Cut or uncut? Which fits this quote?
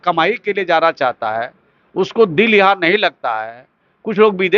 uncut